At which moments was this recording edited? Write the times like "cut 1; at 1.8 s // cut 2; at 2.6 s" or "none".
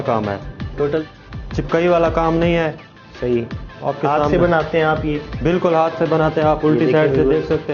cut 1; at 1.0 s